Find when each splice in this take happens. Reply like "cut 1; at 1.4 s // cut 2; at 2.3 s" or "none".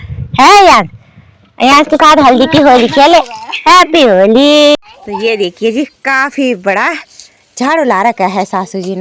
cut 1; at 4.8 s